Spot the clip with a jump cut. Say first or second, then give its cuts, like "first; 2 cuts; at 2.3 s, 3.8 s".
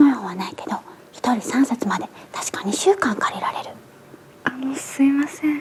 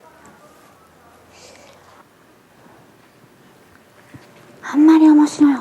second; 2 cuts; at 2.0 s, 3.6 s